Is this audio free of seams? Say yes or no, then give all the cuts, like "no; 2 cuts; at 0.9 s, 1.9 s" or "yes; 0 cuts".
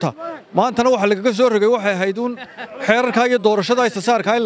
yes; 0 cuts